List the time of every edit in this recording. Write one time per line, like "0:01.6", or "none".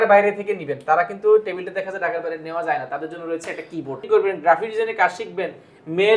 0:04.0